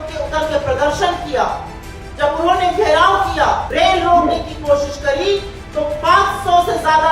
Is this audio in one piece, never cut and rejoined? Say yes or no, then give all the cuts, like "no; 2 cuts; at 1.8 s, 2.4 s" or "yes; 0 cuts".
no; 1 cut; at 3.7 s